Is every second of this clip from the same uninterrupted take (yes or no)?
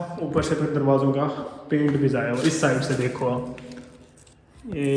yes